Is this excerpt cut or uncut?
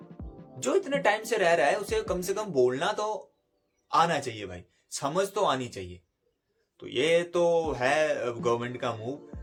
uncut